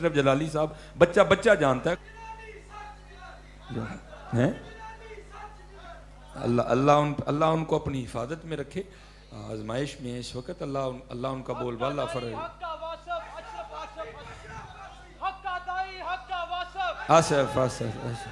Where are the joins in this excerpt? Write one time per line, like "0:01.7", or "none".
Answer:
0:02.0